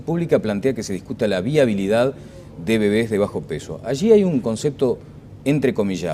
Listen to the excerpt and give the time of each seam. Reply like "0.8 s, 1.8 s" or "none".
none